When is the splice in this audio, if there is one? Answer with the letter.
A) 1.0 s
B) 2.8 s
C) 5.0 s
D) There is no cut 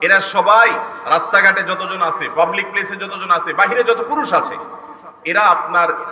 D